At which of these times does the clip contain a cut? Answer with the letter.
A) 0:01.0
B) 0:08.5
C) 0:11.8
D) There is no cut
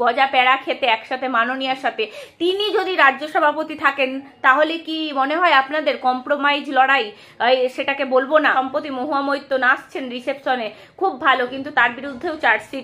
B